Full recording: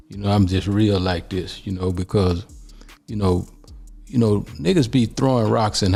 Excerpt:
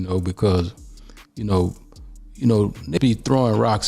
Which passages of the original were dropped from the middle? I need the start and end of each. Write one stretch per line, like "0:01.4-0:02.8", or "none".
0:04.7-0:04.9